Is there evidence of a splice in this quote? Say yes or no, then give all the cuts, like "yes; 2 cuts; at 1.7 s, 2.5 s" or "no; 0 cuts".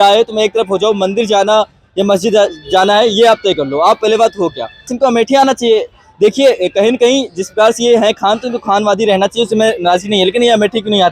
yes; 1 cut; at 4.9 s